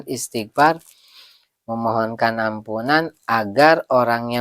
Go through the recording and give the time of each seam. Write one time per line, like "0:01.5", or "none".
none